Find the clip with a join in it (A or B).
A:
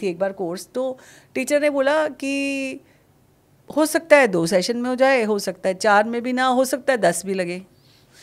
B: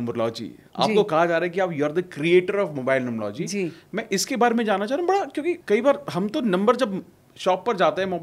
B